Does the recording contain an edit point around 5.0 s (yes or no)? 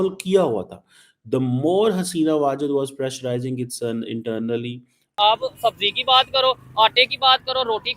yes